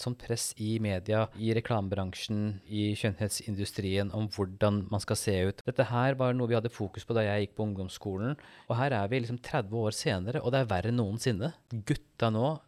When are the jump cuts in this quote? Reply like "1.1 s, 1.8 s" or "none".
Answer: 1.4 s, 2.6 s, 5.6 s, 8.5 s, 11.7 s